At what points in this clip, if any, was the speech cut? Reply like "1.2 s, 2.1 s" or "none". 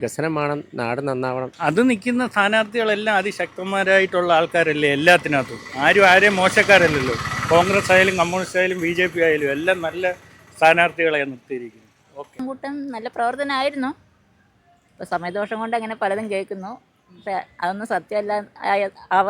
1.5 s, 12.4 s